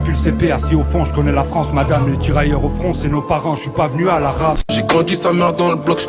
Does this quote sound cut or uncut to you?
cut